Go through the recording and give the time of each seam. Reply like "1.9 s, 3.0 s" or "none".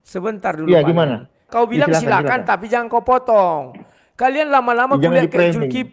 1.4 s